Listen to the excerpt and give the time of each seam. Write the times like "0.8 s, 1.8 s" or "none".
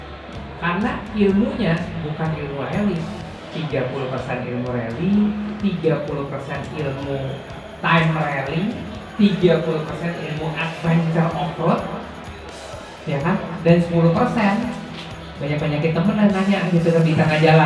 none